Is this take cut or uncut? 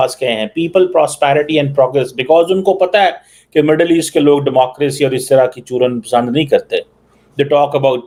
uncut